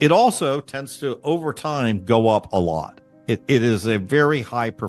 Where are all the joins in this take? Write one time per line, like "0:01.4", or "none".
none